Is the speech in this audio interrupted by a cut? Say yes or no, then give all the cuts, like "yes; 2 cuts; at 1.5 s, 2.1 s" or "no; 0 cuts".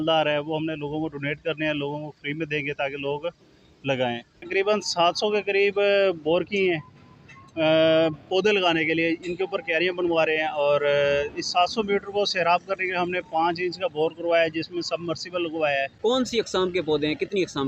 yes; 2 cuts; at 4.5 s, 15.9 s